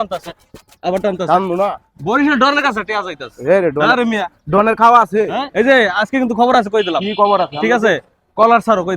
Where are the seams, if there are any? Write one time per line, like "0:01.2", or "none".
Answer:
0:05.4